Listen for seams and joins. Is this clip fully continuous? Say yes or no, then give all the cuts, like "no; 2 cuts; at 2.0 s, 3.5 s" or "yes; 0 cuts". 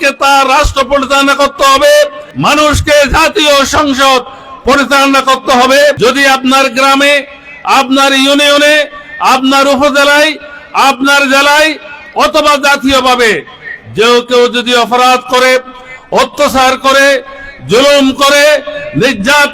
no; 2 cuts; at 2.2 s, 6.0 s